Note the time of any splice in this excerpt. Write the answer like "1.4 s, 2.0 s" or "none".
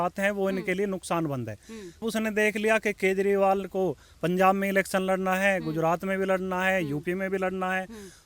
2.0 s